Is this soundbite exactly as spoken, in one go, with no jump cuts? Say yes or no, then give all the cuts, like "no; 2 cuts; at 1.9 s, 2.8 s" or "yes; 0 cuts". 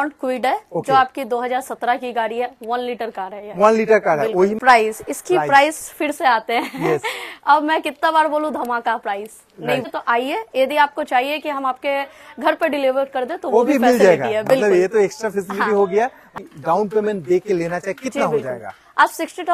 no; 3 cuts; at 4.6 s, 9.8 s, 16.4 s